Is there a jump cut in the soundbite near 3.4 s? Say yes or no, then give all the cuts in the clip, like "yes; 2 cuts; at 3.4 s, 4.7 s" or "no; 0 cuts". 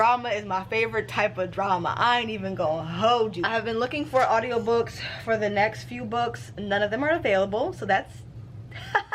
yes; 1 cut; at 3.4 s